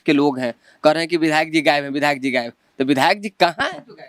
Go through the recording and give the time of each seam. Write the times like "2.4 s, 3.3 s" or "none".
none